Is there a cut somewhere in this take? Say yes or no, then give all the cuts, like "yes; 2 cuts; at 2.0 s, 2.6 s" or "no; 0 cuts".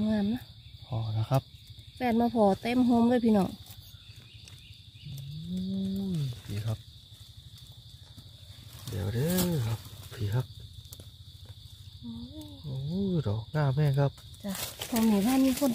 yes; 1 cut; at 14.7 s